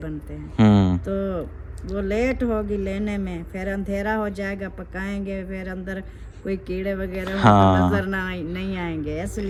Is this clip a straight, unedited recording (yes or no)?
yes